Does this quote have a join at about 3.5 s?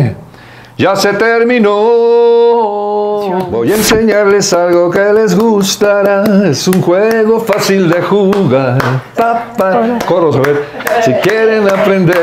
yes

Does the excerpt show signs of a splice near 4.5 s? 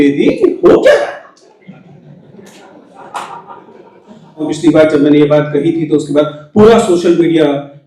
yes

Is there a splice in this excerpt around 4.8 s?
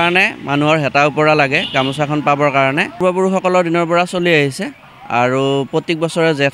no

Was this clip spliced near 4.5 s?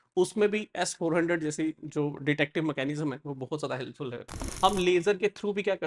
yes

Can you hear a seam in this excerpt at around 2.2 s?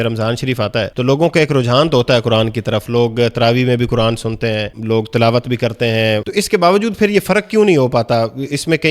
no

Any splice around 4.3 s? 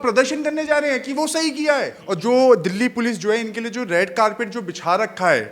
no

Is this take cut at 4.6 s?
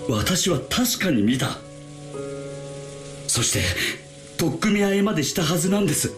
no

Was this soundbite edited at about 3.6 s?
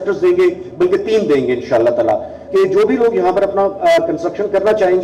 no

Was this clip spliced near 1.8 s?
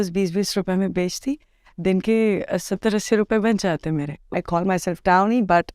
no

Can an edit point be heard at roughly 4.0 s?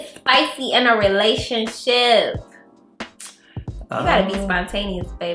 no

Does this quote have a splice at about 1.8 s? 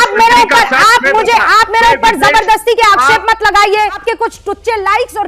no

